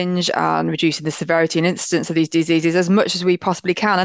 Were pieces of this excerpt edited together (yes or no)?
no